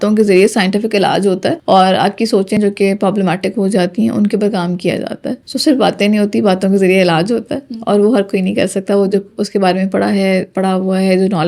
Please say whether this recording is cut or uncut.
uncut